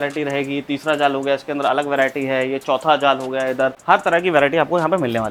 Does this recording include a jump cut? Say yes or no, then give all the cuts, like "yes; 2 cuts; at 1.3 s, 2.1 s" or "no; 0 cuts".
no; 0 cuts